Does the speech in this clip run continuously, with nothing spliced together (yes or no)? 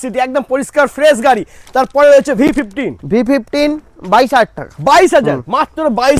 yes